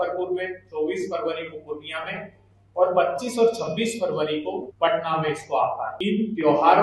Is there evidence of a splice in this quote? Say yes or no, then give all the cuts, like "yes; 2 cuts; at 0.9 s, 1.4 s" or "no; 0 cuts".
yes; 2 cuts; at 4.7 s, 5.9 s